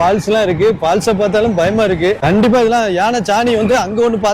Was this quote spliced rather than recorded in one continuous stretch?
yes; 1 cut; at 2.2 s

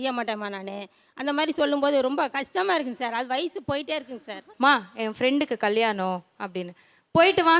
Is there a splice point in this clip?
yes; 1 cut; at 4.5 s

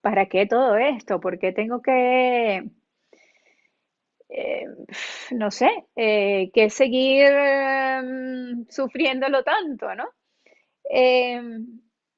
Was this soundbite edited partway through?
no; 0 cuts

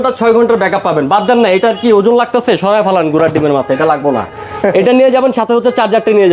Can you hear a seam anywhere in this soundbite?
no; 0 cuts

